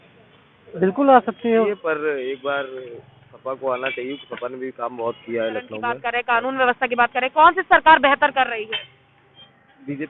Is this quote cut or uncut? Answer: cut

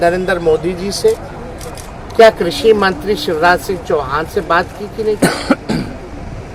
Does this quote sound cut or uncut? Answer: uncut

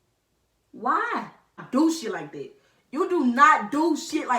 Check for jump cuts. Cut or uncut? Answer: cut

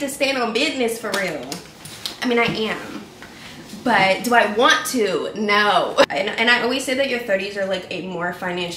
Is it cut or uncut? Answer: uncut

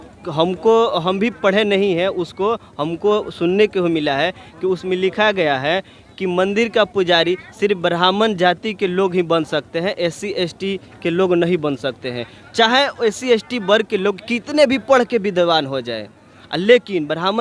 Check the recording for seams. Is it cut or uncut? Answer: uncut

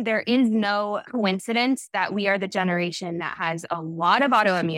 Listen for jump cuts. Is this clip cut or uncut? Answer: cut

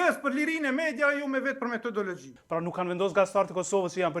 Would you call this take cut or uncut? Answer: cut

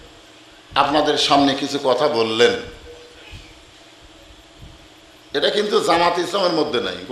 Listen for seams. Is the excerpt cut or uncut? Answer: uncut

